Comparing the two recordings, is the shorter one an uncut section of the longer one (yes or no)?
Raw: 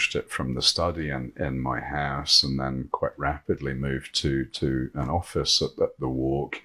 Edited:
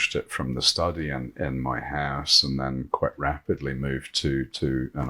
yes